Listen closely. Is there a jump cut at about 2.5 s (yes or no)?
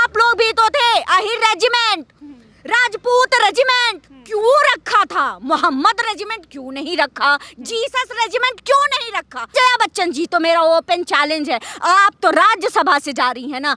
no